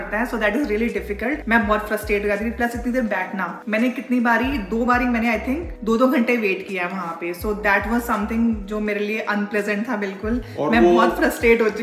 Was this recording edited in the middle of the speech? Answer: no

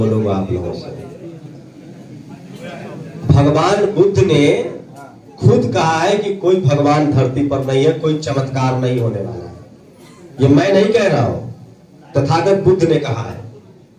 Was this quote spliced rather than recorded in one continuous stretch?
no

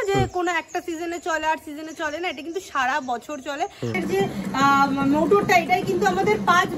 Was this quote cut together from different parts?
yes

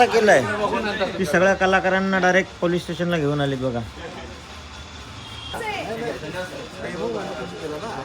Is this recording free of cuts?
no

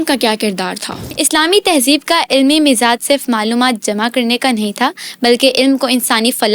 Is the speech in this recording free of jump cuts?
no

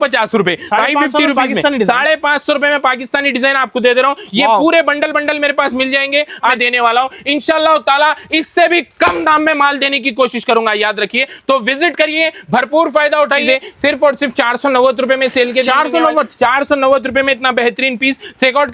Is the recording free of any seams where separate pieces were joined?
no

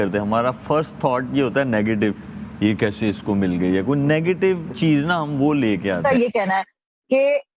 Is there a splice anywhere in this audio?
yes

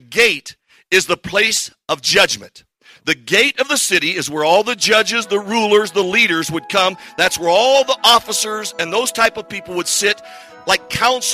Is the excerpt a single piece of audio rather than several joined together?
yes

